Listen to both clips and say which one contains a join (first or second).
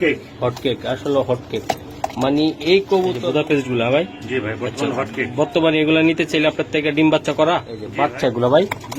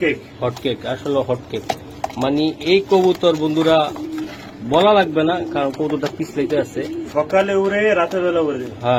first